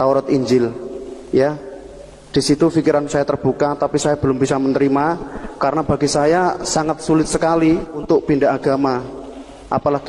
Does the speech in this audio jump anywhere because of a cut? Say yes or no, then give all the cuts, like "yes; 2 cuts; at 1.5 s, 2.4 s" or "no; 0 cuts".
yes; 1 cut; at 8.0 s